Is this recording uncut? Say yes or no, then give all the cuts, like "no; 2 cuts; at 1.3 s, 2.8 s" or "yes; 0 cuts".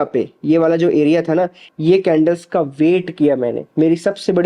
no; 1 cut; at 1.7 s